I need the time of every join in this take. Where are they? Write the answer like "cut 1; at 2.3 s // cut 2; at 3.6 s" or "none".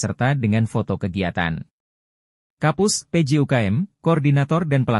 none

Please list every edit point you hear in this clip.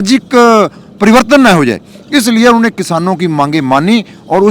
none

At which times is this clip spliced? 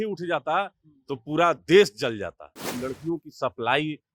cut 1; at 2.7 s

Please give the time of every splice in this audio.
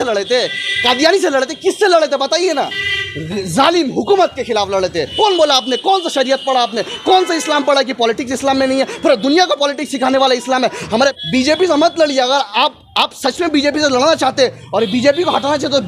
cut 1; at 5.1 s // cut 2; at 11.2 s

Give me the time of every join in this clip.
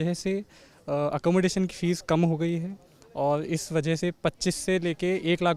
none

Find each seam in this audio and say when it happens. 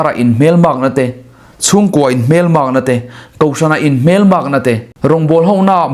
cut 1; at 4.9 s

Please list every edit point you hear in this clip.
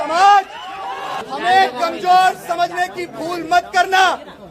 cut 1; at 1.1 s

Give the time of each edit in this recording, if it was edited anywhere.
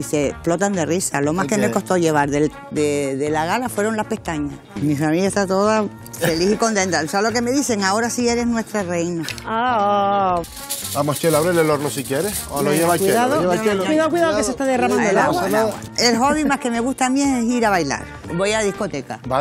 cut 1; at 4.7 s // cut 2; at 6.0 s // cut 3; at 10.5 s // cut 4; at 15.9 s // cut 5; at 18.3 s

